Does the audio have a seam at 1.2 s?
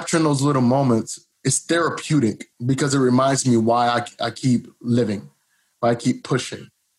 yes; 2 cuts; at 1.2 s, 2.5 s

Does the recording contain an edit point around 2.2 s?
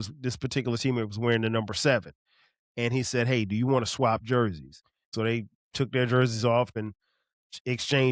no; 2 cuts; at 5.1 s, 6.7 s

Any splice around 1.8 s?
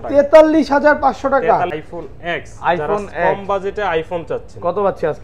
yes; 1 cut; at 1.8 s

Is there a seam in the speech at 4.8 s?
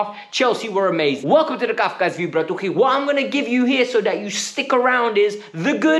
no; 1 cut; at 1.2 s

